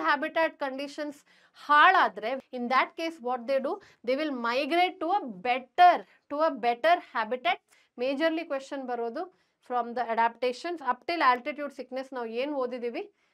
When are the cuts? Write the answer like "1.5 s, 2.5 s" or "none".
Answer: 2.4 s, 7.6 s